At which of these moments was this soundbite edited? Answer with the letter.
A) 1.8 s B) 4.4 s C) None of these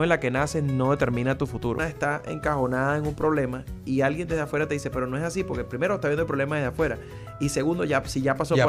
A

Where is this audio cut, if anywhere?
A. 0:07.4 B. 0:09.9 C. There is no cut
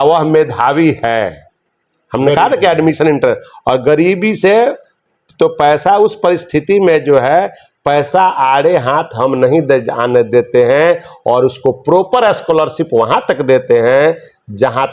C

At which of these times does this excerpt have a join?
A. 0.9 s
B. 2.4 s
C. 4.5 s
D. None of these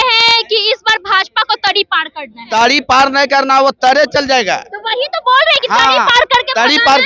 B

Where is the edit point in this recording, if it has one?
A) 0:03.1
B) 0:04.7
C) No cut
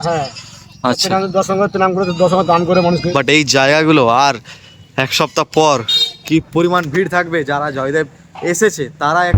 A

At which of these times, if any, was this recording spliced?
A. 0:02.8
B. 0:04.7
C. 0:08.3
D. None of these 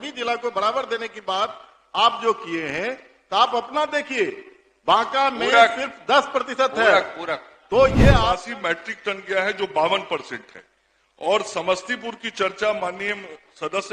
C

